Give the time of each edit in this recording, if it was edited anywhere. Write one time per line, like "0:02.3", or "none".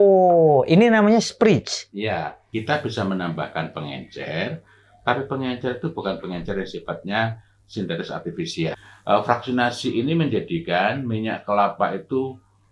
0:02.5
0:08.8